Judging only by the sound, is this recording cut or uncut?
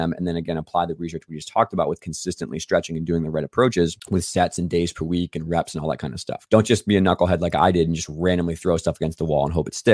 cut